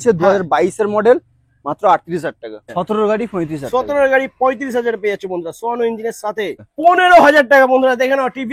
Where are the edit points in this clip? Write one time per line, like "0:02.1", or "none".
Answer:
0:02.7
0:06.6